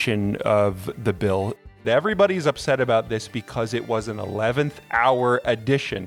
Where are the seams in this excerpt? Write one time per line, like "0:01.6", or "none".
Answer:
0:01.7

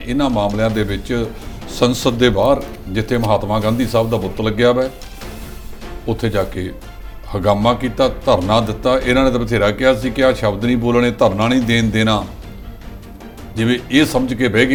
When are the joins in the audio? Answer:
none

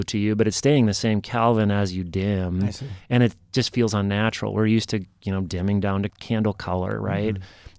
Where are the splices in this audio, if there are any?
0:06.1

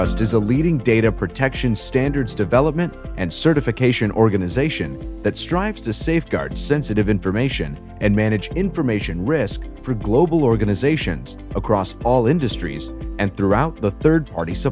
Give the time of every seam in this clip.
none

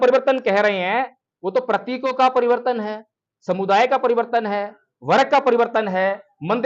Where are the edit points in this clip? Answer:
none

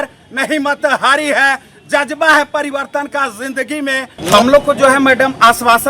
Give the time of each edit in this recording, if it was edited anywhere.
0:04.1

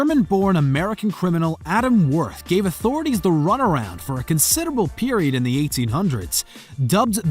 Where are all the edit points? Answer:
0:03.8

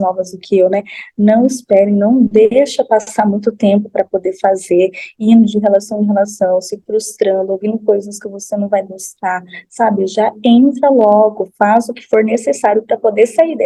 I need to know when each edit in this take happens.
none

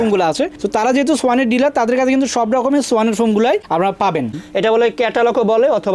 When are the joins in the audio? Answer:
0:04.3

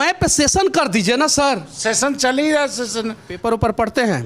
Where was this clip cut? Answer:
0:03.3

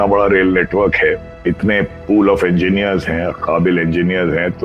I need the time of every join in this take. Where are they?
0:01.3

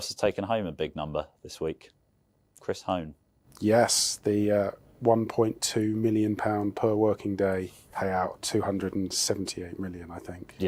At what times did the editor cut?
0:07.8

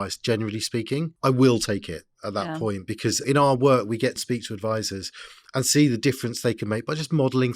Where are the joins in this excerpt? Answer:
0:01.1
0:03.2
0:04.2

